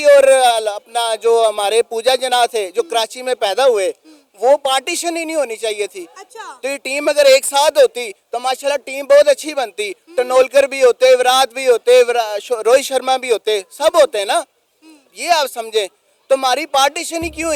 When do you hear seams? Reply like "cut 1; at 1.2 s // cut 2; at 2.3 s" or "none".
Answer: none